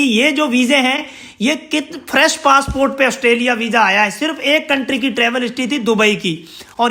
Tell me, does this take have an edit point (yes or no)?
no